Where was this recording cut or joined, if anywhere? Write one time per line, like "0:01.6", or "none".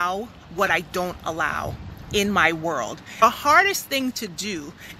0:03.2